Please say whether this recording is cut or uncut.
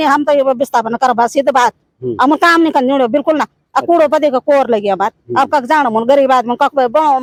uncut